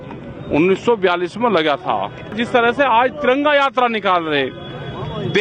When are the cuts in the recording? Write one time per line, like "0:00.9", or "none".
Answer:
0:02.4